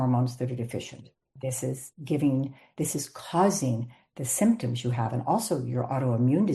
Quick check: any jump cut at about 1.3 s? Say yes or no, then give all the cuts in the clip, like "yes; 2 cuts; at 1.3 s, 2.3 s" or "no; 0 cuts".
yes; 1 cut; at 1.3 s